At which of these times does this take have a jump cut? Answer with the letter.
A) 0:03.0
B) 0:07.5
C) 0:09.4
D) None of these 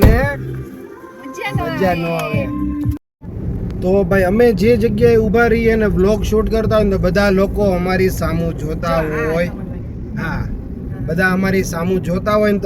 A